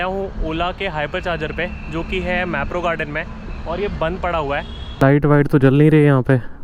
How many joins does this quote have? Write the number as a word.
one